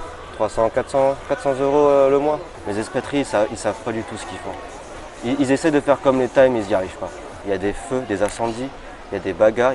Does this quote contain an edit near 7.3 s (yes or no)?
yes